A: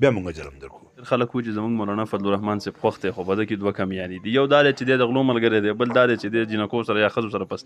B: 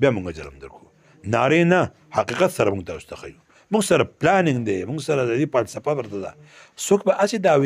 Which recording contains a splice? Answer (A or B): A